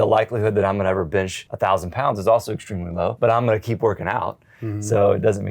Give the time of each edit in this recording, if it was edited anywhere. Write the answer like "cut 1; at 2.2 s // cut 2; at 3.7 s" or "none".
cut 1; at 1.4 s // cut 2; at 3.1 s